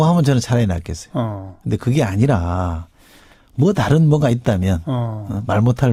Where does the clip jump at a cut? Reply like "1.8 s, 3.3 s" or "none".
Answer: none